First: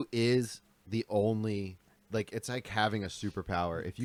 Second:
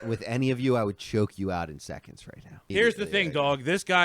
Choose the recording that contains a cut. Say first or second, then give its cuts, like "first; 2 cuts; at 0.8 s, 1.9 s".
second; 1 cut; at 2.7 s